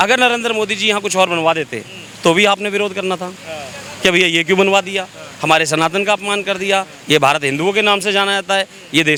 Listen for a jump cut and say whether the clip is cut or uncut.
uncut